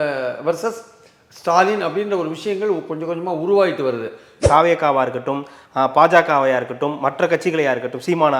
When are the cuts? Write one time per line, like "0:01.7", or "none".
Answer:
0:04.3